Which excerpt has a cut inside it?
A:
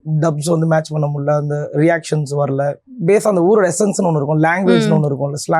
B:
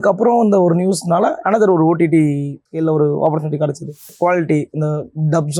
B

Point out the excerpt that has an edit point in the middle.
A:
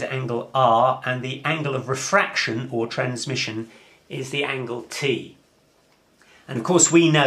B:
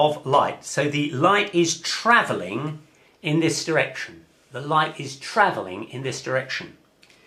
A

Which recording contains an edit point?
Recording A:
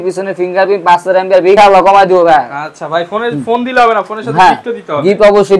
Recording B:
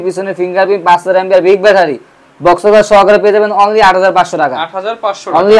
A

